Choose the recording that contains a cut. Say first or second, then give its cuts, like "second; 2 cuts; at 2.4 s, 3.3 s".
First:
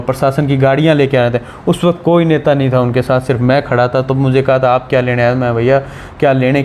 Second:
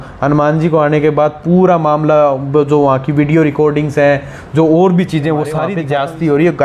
second; 1 cut; at 5.7 s